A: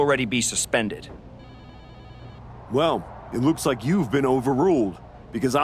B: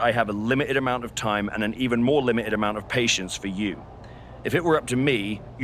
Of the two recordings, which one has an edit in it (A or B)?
A